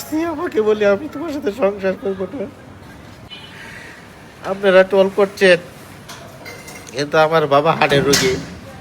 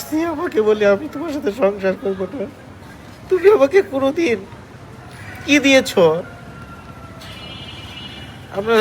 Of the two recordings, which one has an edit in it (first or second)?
first